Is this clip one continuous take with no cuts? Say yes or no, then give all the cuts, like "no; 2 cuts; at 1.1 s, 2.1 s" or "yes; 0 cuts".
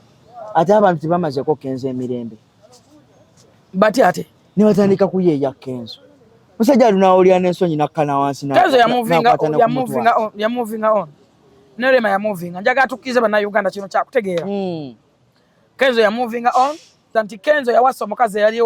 no; 1 cut; at 17.0 s